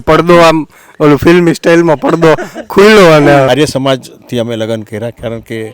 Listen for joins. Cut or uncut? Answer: cut